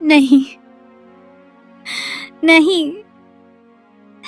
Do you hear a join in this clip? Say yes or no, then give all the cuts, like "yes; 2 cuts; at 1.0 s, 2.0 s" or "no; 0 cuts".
no; 0 cuts